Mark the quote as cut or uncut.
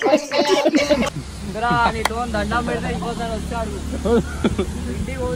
uncut